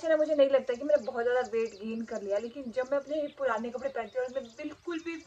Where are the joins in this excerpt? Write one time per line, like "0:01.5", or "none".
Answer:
none